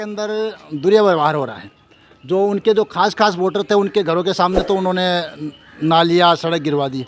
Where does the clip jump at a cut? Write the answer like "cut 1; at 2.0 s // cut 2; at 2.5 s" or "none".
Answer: none